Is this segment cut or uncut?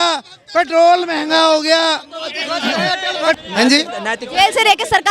cut